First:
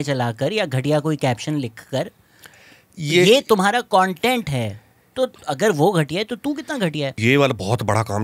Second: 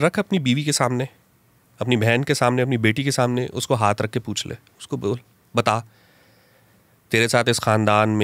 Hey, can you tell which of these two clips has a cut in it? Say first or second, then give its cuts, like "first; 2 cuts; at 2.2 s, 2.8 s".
first; 1 cut; at 7.2 s